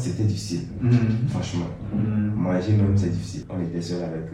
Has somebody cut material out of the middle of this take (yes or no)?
yes